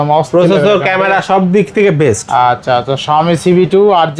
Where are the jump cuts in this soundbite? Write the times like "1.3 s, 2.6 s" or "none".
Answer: none